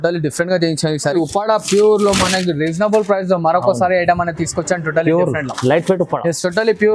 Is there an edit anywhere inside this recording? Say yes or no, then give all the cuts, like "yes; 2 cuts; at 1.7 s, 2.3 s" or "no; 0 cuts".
yes; 1 cut; at 1.2 s